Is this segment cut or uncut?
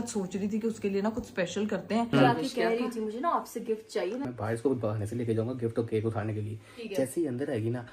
cut